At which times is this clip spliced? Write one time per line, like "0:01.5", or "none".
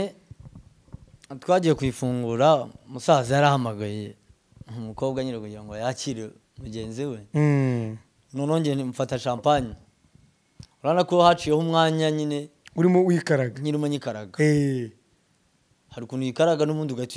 none